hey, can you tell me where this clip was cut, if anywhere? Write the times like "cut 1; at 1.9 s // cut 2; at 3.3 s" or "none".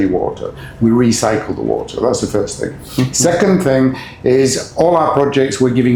none